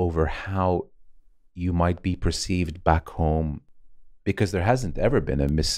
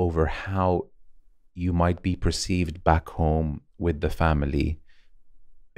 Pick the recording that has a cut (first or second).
first